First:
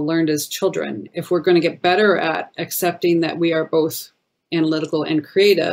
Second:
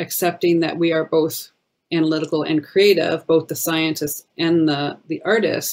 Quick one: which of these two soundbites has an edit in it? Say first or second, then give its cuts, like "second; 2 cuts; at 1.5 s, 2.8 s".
first; 1 cut; at 1.0 s